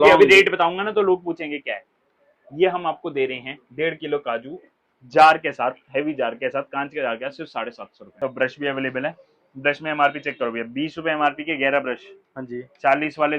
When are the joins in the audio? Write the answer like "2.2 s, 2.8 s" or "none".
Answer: 8.1 s

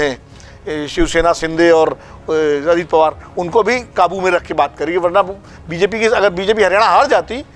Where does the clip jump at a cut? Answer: none

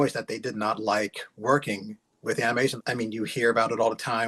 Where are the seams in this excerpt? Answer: 2.7 s

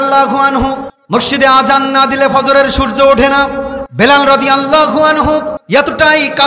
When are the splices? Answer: 0.9 s, 3.8 s, 5.6 s

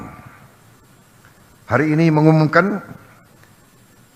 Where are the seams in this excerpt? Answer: none

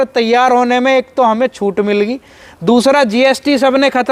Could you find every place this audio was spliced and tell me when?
none

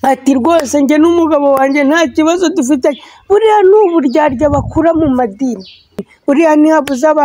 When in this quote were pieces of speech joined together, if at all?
6.1 s

